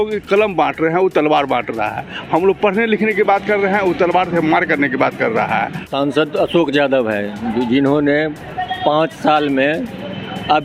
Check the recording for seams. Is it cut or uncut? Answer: cut